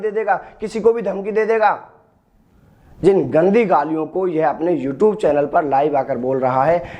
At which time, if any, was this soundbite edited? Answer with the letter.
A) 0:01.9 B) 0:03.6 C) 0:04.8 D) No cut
D